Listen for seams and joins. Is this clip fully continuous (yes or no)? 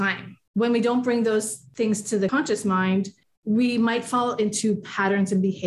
no